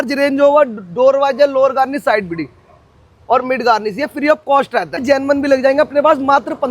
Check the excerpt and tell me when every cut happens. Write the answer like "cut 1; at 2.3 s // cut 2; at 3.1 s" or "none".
cut 1; at 5.0 s